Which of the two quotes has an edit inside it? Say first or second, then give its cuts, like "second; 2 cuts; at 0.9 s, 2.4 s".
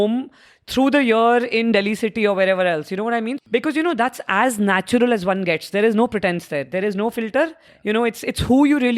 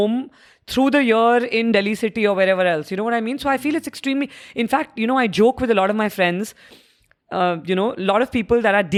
first; 2 cuts; at 3.4 s, 7.7 s